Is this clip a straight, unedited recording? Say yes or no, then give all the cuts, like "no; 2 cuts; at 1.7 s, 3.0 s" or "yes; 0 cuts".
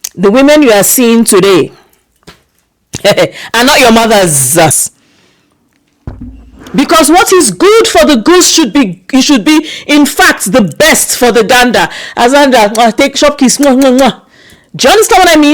no; 1 cut; at 4.7 s